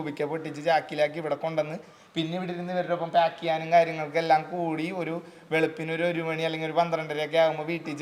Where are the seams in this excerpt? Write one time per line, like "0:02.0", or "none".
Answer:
none